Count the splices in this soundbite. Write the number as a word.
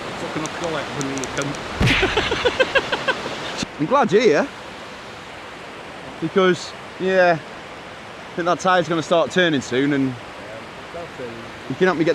one